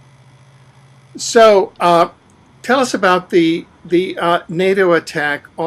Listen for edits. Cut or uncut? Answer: uncut